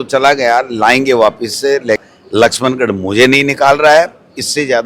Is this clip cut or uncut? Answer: cut